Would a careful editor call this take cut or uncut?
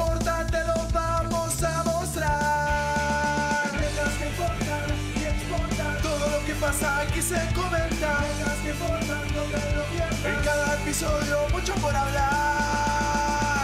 uncut